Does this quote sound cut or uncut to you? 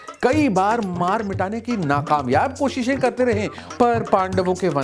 cut